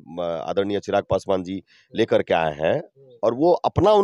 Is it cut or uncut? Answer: uncut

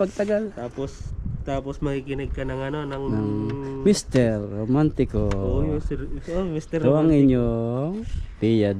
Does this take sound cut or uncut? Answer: uncut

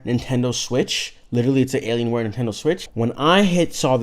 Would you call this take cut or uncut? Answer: cut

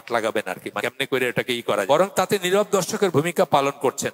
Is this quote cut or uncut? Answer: cut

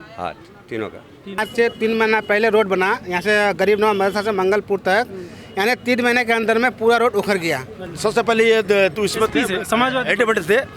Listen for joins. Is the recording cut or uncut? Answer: cut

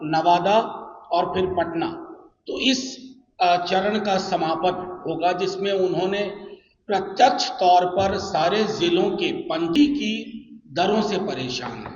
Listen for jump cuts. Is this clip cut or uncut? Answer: cut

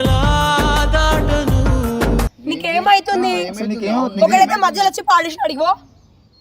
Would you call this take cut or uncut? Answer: cut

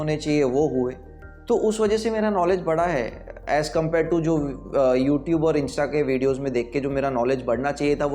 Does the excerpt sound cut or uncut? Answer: uncut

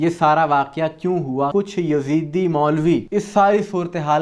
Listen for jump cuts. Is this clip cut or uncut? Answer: cut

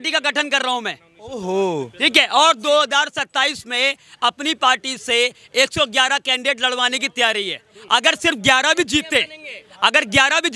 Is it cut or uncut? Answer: uncut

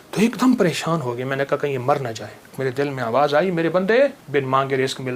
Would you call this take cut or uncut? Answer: cut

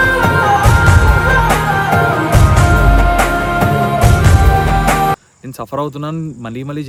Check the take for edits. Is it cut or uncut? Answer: uncut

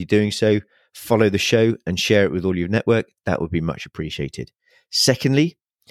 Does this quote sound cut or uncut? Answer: uncut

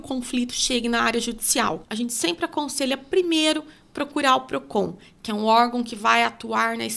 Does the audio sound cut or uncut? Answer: cut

